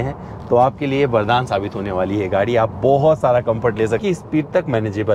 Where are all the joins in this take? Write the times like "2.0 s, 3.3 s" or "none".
4.0 s

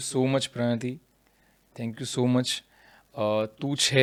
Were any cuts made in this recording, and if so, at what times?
none

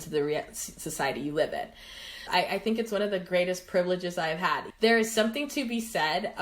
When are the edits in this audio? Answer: 2.2 s, 4.7 s

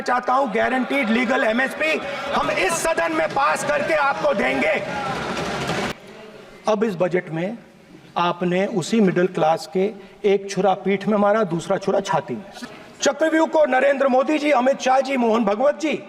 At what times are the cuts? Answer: 5.9 s, 12.5 s

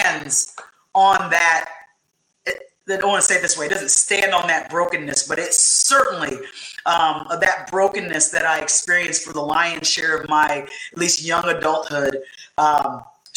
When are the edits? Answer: none

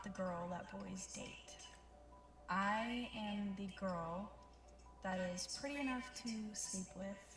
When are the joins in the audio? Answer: none

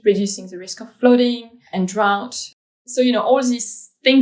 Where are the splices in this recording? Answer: 1.6 s, 2.5 s

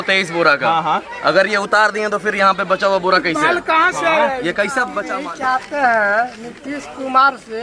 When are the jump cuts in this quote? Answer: 5.0 s

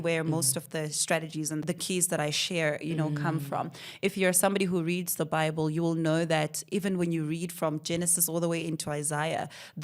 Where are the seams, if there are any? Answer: 1.6 s

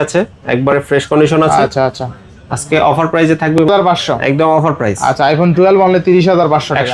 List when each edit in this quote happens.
3.7 s

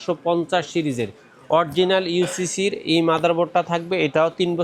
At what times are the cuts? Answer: none

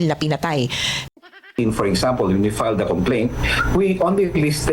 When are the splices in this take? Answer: 1.5 s

